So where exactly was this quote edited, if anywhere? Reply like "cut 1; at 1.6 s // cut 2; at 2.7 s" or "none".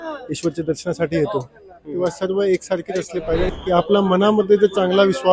cut 1; at 3.5 s